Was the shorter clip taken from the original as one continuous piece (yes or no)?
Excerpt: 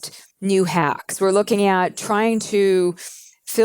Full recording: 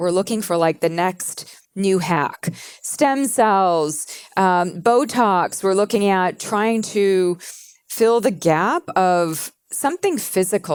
no